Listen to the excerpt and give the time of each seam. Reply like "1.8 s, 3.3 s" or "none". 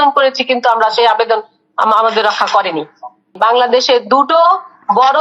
3.3 s